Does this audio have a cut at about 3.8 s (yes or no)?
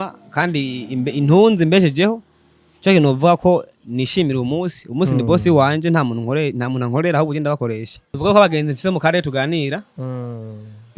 no